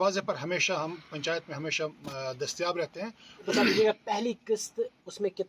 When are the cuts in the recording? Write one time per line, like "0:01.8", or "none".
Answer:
0:03.5

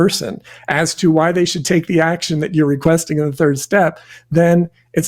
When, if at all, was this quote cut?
0:02.8

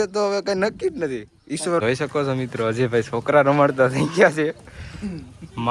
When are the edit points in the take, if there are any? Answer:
0:01.8

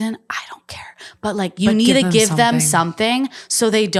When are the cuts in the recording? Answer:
none

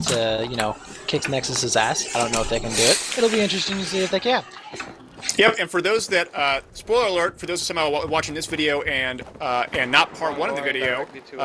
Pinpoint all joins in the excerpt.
0:05.7

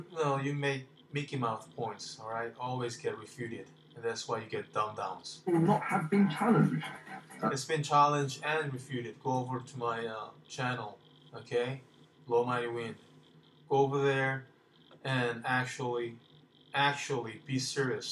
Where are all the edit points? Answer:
0:06.2

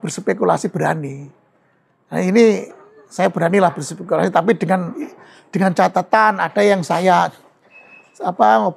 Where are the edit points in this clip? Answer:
none

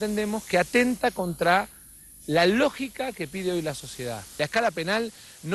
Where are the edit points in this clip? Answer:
0:04.2

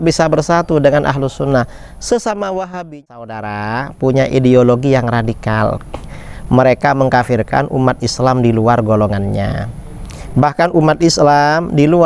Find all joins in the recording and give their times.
0:03.1

